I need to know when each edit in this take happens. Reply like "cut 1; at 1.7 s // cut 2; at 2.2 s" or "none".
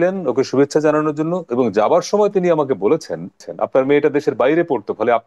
cut 1; at 3.5 s